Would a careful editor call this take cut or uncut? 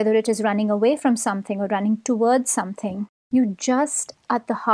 uncut